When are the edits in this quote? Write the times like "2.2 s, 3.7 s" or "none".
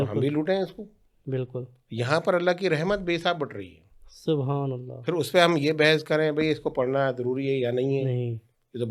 none